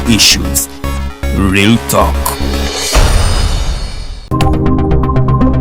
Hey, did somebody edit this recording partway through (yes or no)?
no